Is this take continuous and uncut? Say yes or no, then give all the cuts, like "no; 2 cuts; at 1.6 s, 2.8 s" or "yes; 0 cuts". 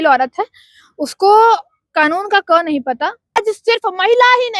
no; 1 cut; at 3.3 s